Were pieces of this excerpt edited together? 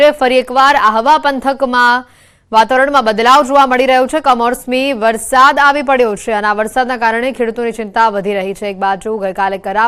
no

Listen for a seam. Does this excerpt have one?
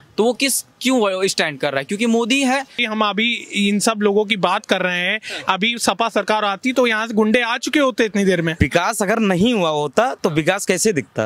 yes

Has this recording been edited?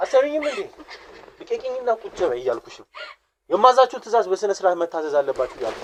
no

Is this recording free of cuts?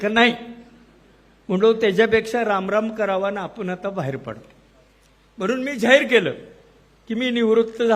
yes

